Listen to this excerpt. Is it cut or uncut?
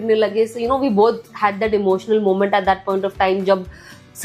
uncut